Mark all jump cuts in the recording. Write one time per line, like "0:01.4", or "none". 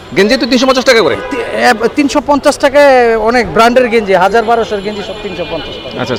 none